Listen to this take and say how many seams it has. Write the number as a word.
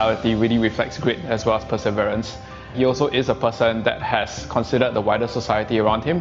one